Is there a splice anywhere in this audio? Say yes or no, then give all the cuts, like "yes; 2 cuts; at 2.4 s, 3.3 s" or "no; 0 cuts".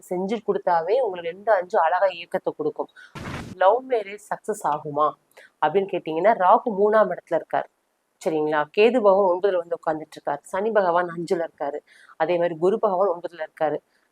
yes; 1 cut; at 3.2 s